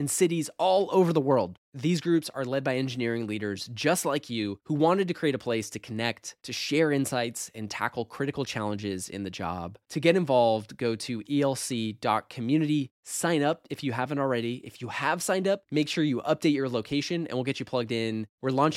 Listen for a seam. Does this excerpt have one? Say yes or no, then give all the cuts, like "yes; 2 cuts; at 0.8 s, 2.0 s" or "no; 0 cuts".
no; 0 cuts